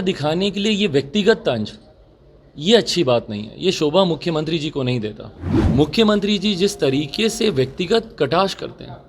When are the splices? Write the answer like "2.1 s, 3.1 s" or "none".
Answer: 5.6 s